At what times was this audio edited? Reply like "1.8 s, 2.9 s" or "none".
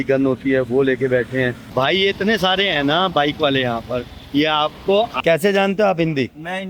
1.6 s, 5.2 s